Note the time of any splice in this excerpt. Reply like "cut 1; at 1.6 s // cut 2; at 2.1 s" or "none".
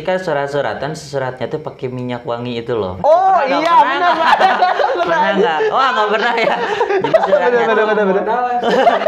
none